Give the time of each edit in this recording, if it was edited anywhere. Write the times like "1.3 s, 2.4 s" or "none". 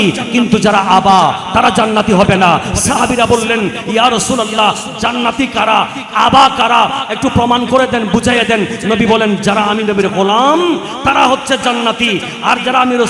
none